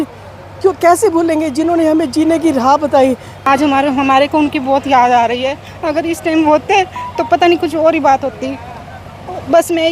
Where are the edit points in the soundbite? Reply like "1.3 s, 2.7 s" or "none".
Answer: 3.5 s